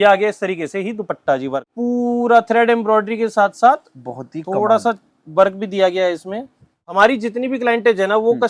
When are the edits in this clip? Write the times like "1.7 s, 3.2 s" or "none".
1.7 s, 6.9 s